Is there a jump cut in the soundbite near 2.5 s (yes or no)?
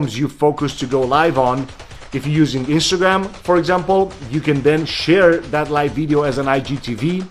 no